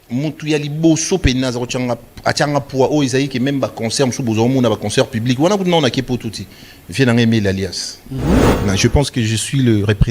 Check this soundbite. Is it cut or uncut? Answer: cut